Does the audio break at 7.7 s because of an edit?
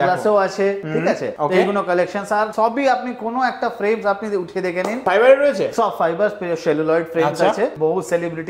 yes; 2 cuts; at 5.0 s, 7.7 s

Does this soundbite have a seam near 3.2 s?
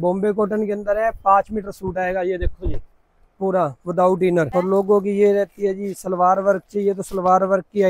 no; 1 cut; at 4.5 s

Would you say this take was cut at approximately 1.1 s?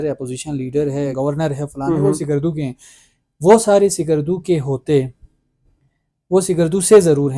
yes; 1 cut; at 1.1 s

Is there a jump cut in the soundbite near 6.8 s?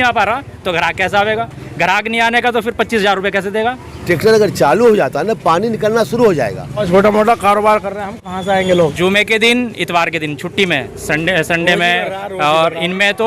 yes; 3 cuts; at 3.9 s, 6.8 s, 8.9 s

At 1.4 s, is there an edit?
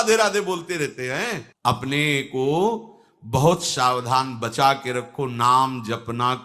yes; 1 cut; at 1.4 s

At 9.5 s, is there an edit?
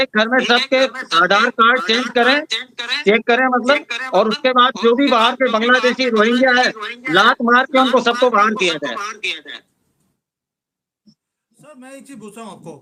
no; 0 cuts

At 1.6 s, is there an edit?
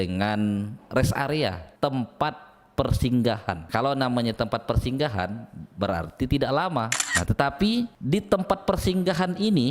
yes; 2 cuts; at 1.6 s, 3.6 s

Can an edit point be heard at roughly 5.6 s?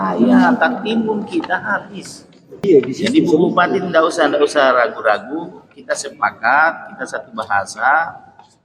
no; 1 cut; at 2.6 s

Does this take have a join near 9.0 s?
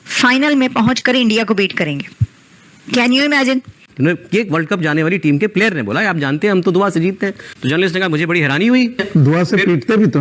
yes; 2 cuts; at 3.8 s, 9.0 s

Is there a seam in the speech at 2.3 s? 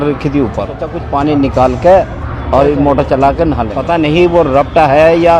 no; 2 cuts; at 1.0 s, 3.7 s

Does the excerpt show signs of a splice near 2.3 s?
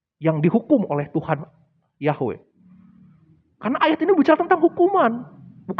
no; 0 cuts

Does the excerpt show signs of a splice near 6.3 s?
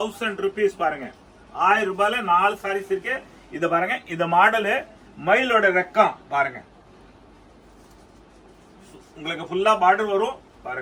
no; 0 cuts

